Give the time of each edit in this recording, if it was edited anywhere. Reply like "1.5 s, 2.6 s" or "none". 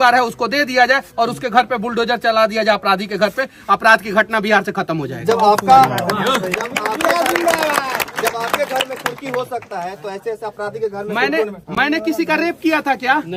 none